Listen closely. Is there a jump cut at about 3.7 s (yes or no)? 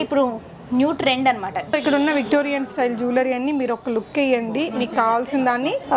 no